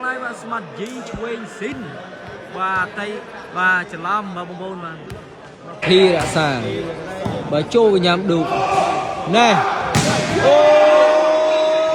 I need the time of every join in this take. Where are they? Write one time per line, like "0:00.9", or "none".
0:05.8